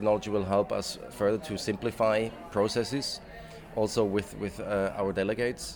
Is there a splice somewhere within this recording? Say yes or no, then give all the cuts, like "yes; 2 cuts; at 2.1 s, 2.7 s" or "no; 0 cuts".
no; 0 cuts